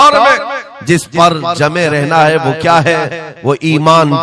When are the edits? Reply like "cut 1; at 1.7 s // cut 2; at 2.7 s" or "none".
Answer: none